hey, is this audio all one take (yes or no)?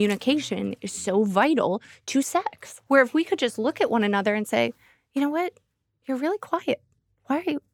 no